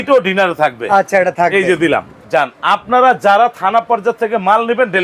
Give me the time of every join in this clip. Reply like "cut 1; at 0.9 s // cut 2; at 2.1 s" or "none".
cut 1; at 2.2 s